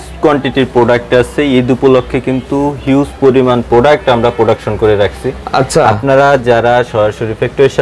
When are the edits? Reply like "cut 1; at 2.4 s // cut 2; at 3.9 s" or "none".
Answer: none